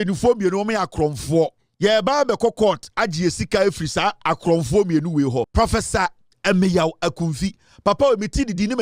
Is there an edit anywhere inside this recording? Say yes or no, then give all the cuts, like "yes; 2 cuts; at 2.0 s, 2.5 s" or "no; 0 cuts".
yes; 2 cuts; at 1.6 s, 5.5 s